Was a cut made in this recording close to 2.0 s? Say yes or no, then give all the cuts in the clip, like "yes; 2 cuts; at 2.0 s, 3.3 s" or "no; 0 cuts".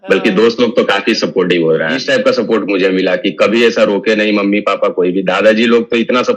yes; 1 cut; at 2.0 s